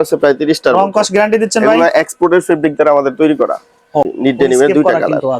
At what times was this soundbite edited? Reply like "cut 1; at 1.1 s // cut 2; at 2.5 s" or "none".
cut 1; at 4.1 s